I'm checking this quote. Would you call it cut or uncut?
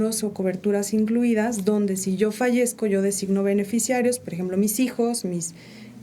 uncut